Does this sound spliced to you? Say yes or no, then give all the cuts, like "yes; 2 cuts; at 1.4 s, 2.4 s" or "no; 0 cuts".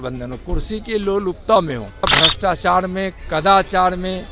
yes; 1 cut; at 2.1 s